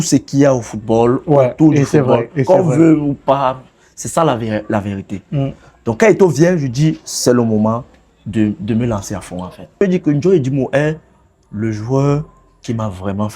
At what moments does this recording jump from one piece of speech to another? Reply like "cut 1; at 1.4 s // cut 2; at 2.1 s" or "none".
cut 1; at 9.7 s